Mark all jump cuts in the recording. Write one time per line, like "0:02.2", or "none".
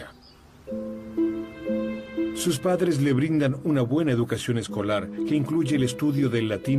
none

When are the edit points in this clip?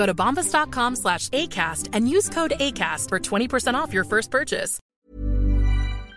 0:04.9

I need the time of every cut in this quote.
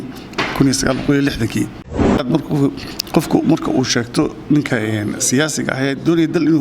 0:02.0

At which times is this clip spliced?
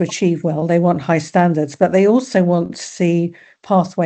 none

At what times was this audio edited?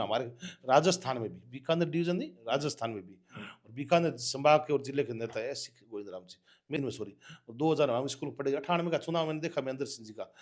0:06.8

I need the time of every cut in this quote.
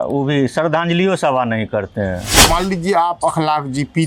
0:02.4

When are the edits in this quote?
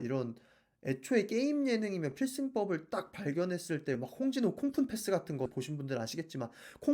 none

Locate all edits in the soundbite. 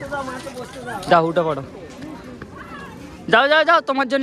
none

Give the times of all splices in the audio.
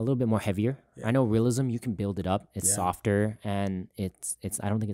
none

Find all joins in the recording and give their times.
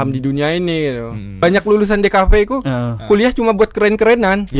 0:01.2

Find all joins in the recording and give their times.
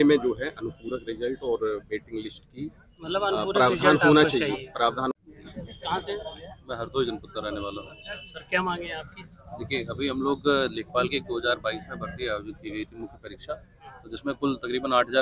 0:05.1

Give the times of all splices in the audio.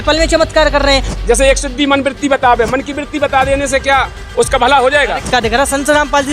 0:01.1
0:05.3

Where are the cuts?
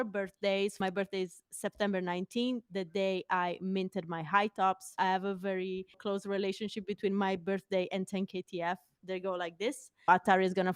0:00.8
0:04.9
0:06.0
0:10.1

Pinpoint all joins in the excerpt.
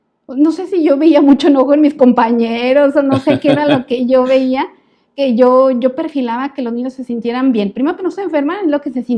none

